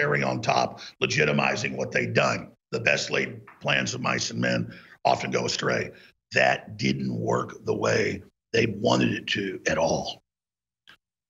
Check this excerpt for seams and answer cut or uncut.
cut